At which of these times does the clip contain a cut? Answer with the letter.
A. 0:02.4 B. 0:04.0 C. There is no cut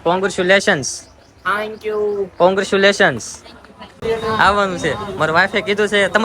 B